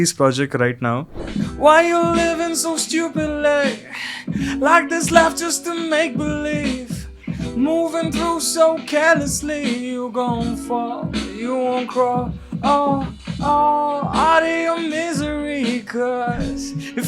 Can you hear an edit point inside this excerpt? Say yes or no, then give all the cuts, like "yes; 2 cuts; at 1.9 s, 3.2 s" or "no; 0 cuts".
yes; 1 cut; at 1.2 s